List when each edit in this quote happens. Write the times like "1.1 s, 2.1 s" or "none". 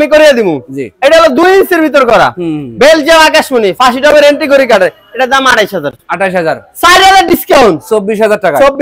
none

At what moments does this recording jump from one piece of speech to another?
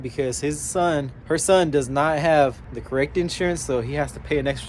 1.1 s, 2.7 s

